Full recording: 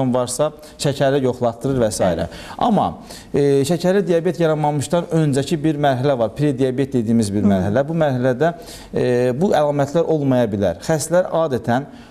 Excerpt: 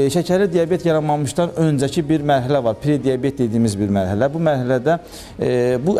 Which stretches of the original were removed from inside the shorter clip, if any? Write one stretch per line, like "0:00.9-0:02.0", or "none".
none